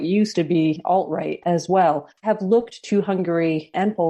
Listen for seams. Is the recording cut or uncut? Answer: uncut